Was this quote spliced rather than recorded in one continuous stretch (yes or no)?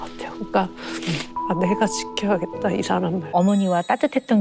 yes